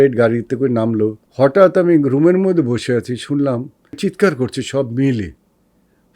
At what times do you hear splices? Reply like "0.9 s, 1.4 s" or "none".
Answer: 1.2 s